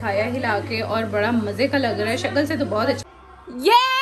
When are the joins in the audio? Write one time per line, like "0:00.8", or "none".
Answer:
0:03.0